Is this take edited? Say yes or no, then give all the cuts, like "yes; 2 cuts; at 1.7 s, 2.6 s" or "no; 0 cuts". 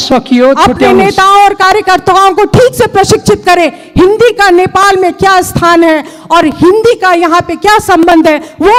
no; 0 cuts